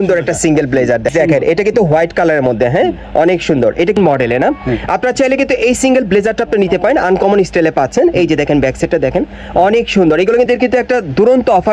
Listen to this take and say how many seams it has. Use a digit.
3